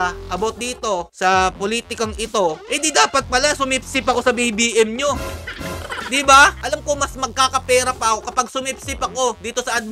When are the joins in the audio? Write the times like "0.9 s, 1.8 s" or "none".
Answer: 6.6 s